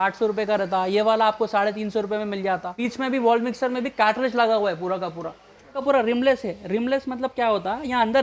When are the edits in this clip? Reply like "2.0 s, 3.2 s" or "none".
2.8 s, 5.8 s